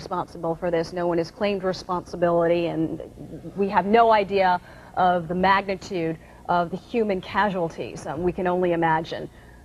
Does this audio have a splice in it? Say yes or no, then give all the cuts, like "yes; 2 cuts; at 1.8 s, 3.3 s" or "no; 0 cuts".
yes; 1 cut; at 8.5 s